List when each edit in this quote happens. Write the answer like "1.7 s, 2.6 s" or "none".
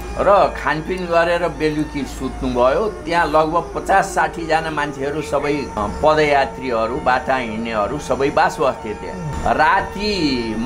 5.8 s, 9.3 s